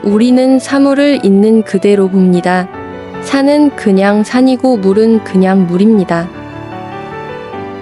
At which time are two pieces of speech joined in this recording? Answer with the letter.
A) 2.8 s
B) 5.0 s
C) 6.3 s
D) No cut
C